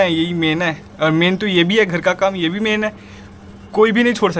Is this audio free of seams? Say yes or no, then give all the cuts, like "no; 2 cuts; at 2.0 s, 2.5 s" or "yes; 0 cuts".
yes; 0 cuts